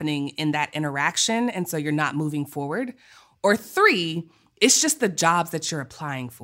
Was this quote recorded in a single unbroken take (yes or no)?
yes